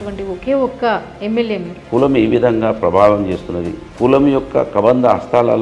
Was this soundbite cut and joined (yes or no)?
yes